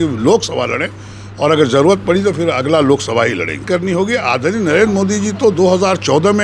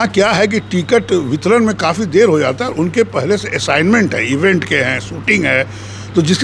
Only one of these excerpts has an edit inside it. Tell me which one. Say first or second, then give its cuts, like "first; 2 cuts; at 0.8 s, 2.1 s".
first; 1 cut; at 3.6 s